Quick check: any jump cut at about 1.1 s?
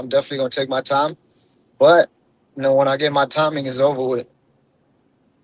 no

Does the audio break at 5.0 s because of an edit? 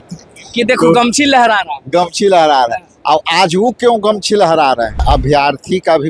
yes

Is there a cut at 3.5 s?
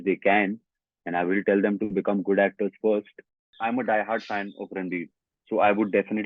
yes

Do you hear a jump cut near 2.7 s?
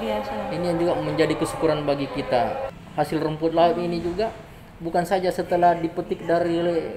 yes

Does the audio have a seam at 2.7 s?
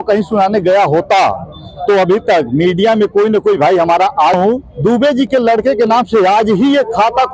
no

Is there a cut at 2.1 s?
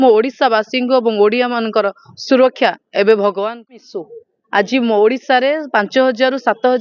no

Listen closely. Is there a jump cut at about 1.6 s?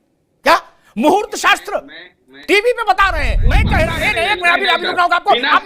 no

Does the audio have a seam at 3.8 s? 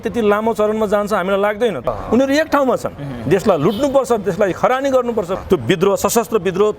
no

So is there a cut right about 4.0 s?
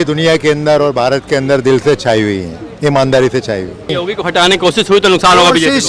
yes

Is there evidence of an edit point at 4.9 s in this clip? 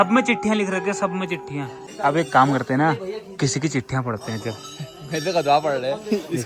no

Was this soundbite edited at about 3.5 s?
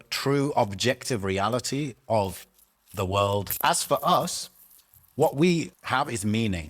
yes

